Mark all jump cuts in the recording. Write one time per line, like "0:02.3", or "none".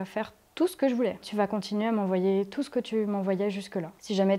0:01.2